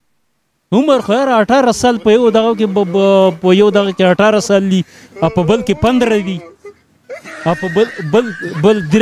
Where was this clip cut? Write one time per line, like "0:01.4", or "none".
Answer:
none